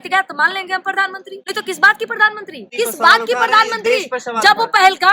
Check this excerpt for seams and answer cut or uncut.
cut